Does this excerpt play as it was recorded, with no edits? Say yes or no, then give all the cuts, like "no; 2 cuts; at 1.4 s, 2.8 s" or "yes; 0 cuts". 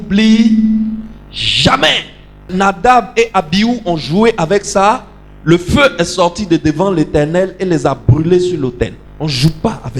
no; 1 cut; at 9.0 s